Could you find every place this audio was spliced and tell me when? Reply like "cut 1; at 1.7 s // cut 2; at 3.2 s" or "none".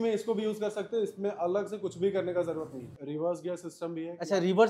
cut 1; at 2.8 s

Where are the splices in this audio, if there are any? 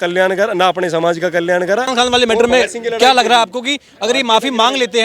cut 1; at 1.9 s

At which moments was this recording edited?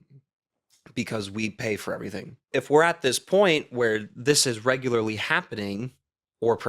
cut 1; at 2.4 s

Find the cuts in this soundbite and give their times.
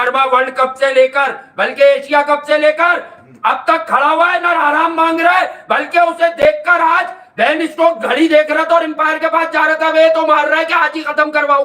none

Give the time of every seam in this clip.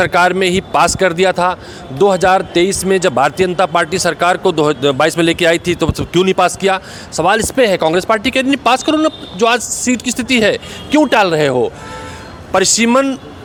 none

